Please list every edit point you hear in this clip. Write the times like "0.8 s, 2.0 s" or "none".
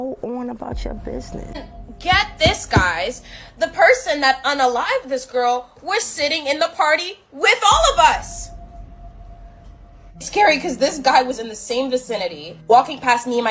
1.8 s

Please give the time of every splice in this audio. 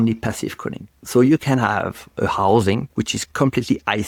none

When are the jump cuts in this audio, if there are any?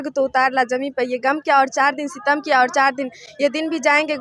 none

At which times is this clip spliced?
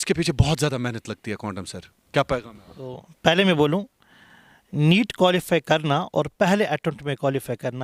3.1 s

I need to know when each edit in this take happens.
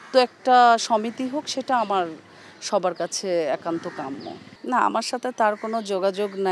none

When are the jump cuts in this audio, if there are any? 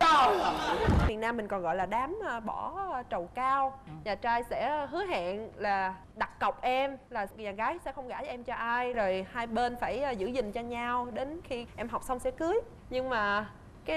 1.1 s

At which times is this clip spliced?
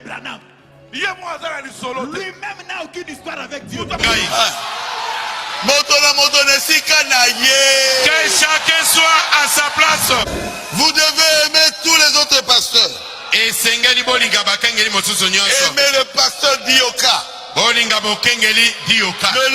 4.0 s, 10.2 s

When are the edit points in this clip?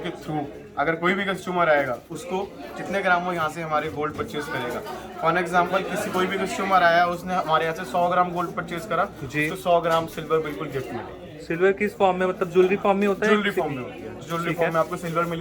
none

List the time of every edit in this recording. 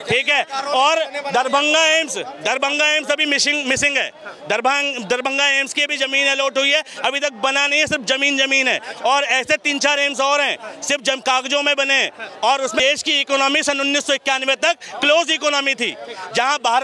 12.8 s

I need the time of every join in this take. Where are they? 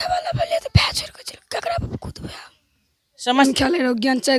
3.5 s

